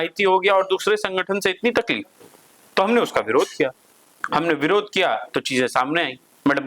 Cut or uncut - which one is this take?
uncut